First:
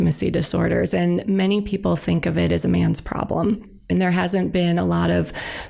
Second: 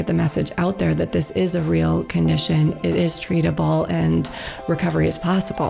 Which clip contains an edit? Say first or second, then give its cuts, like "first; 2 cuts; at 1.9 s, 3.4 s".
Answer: first; 2 cuts; at 1.2 s, 3.9 s